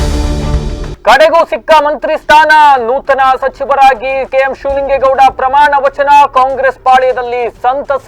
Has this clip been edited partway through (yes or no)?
yes